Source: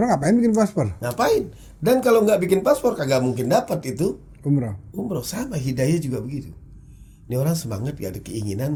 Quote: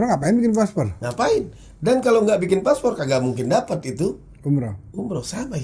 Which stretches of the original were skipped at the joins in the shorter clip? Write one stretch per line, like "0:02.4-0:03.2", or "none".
none